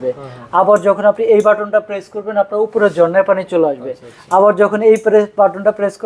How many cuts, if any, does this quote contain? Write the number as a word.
zero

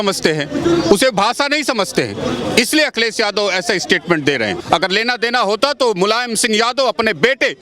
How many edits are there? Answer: one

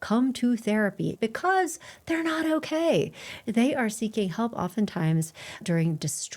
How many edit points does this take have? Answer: one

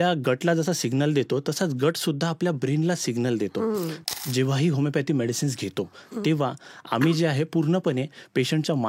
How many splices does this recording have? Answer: one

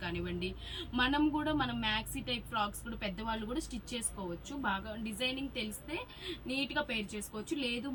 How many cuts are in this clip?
zero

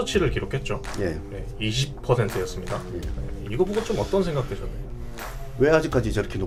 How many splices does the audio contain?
zero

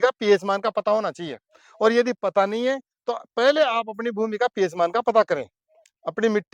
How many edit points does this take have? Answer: zero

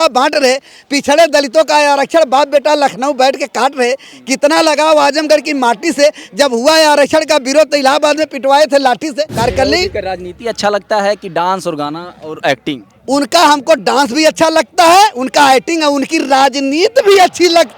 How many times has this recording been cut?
one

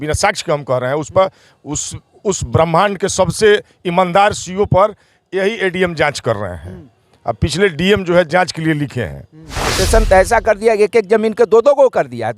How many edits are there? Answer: one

